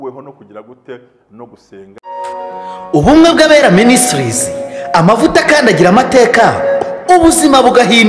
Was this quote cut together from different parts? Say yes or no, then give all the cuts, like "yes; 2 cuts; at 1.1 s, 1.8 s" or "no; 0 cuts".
yes; 1 cut; at 2.0 s